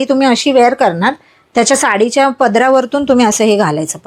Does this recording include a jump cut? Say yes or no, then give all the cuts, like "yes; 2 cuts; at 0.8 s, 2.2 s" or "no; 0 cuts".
no; 0 cuts